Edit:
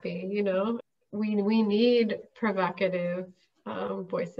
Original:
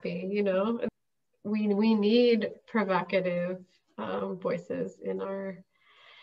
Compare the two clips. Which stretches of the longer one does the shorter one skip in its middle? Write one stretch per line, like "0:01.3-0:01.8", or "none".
0:00.9-0:01.3